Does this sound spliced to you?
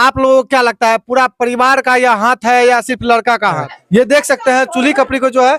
yes; 1 cut; at 3.8 s

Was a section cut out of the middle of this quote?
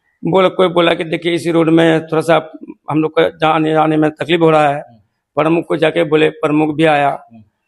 no; 0 cuts

